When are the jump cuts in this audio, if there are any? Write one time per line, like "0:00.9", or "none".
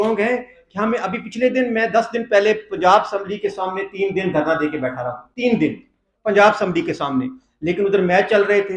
none